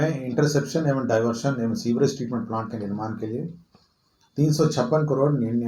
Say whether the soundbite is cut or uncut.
uncut